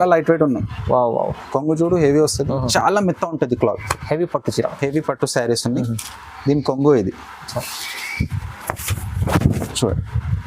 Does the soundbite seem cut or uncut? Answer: cut